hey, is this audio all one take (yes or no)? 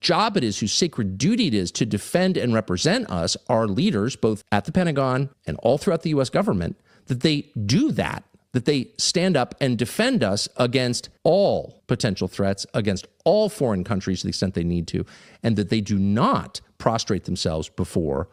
yes